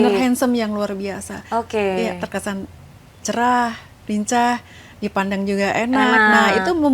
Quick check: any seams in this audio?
no; 0 cuts

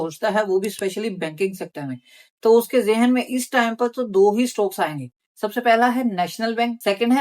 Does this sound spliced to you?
no; 0 cuts

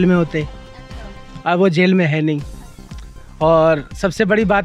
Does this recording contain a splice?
no; 0 cuts

